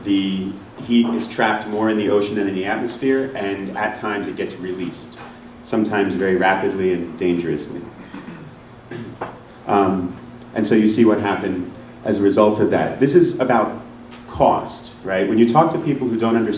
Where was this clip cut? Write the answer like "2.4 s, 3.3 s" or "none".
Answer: 5.4 s